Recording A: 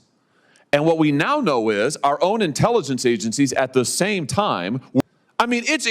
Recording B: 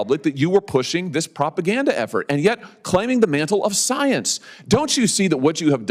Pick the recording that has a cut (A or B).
A